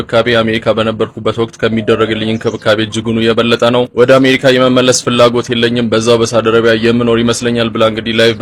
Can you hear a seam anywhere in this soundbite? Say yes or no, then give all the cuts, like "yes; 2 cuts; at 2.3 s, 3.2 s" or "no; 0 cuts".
no; 0 cuts